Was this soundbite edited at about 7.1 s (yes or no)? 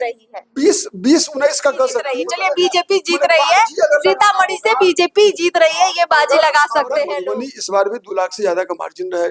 yes